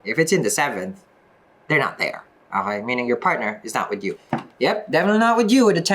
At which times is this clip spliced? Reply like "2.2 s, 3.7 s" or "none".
4.2 s